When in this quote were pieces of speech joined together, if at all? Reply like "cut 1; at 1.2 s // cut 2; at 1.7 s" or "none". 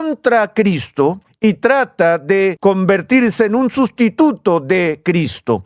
cut 1; at 1.3 s // cut 2; at 2.6 s

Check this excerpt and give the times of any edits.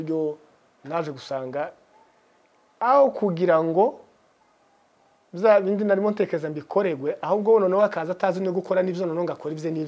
none

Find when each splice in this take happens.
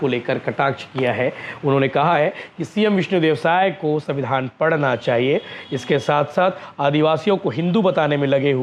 none

